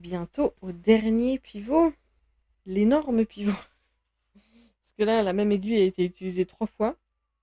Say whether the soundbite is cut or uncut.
uncut